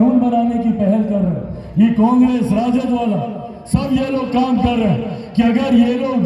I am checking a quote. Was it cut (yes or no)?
no